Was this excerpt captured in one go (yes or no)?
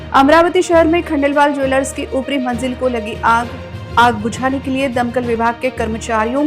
yes